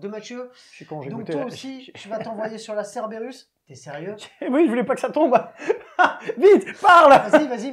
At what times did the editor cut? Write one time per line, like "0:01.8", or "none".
none